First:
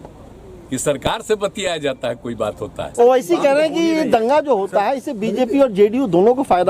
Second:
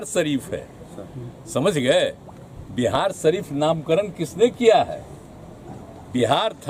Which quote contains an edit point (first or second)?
first